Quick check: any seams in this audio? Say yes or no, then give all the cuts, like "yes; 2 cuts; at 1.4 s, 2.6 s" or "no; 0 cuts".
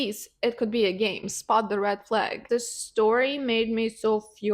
yes; 1 cut; at 2.4 s